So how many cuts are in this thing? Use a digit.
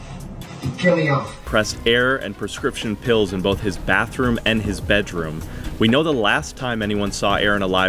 1